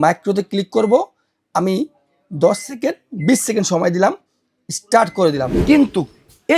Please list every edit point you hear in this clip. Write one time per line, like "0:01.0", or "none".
0:05.5